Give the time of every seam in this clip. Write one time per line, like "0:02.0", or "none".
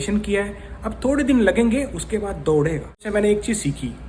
0:03.1